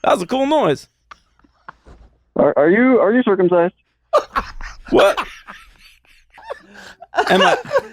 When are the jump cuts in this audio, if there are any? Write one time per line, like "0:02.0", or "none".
0:06.4